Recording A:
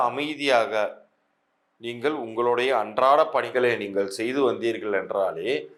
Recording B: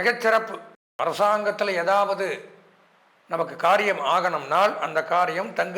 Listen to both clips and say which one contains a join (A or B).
B